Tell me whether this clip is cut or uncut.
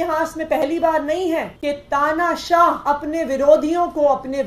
cut